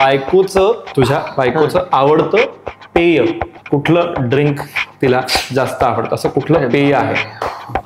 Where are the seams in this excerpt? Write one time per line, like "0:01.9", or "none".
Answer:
0:00.9
0:03.5